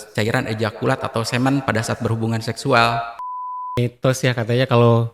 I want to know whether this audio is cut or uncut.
cut